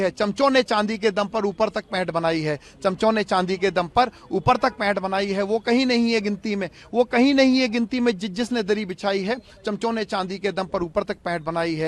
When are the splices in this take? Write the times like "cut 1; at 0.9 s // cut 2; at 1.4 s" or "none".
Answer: none

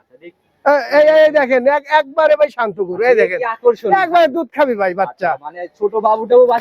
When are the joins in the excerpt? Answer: none

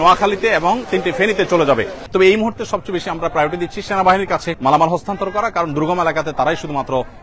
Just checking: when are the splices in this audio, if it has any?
cut 1; at 2.0 s // cut 2; at 4.5 s

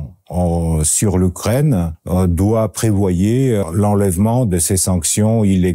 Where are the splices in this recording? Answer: cut 1; at 2.0 s // cut 2; at 3.6 s

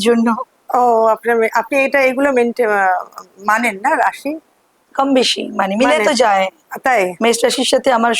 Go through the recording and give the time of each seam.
none

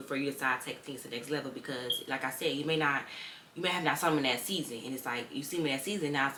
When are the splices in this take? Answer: none

